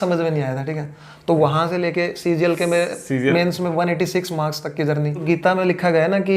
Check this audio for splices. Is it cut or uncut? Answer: cut